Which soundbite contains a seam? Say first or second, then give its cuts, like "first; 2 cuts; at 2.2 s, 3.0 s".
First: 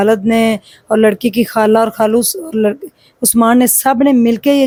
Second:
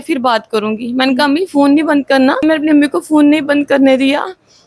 second; 1 cut; at 2.4 s